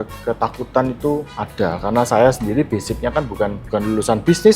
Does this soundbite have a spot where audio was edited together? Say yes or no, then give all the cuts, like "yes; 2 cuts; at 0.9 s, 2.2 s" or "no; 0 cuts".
yes; 2 cuts; at 1.4 s, 3.6 s